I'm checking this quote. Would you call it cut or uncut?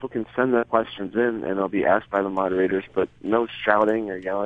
uncut